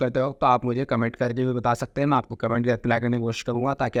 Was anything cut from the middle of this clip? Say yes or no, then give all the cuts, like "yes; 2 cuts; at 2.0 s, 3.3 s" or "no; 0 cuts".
no; 0 cuts